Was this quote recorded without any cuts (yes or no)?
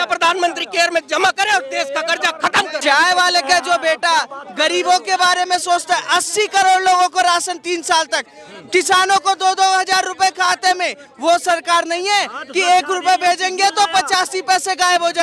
no